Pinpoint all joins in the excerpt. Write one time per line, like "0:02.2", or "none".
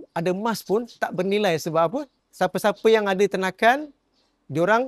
none